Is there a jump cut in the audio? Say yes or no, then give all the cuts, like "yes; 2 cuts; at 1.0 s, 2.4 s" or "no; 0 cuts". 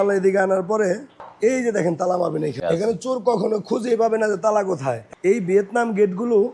yes; 3 cuts; at 1.2 s, 2.6 s, 5.1 s